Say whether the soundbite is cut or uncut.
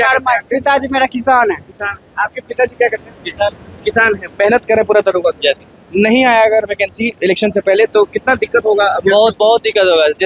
uncut